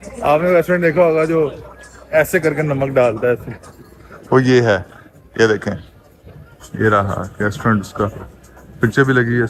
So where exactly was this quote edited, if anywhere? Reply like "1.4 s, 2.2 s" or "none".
none

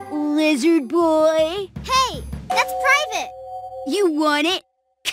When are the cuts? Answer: none

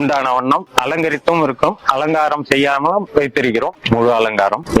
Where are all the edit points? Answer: 3.8 s

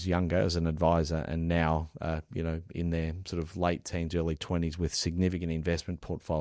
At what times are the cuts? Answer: none

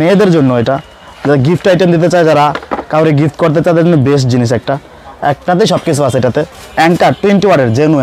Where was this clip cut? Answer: 6.5 s

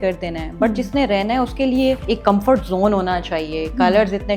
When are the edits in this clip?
2.0 s

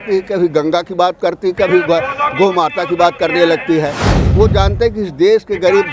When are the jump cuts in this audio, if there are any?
4.0 s

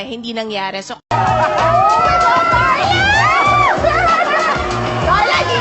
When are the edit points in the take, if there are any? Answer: 1.1 s

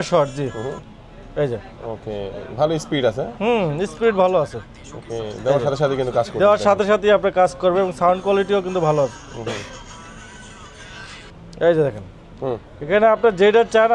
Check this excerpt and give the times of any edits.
none

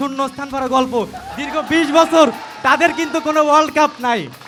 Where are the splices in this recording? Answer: none

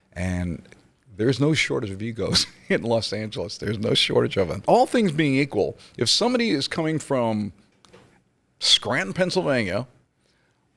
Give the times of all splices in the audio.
4.6 s

